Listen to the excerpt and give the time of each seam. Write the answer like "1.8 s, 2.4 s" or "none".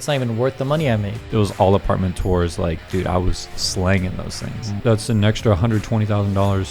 1.2 s, 4.8 s